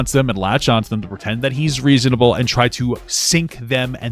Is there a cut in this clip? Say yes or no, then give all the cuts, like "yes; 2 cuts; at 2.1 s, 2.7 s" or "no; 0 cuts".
no; 0 cuts